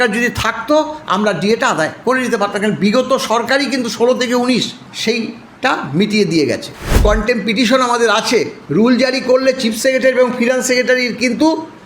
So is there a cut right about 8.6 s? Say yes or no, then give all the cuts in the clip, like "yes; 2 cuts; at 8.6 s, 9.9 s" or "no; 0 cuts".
yes; 4 cuts; at 2.0 s, 4.8 s, 7.0 s, 8.6 s